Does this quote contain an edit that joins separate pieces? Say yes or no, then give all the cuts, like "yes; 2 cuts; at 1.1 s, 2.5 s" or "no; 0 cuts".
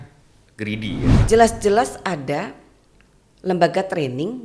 yes; 1 cut; at 1.2 s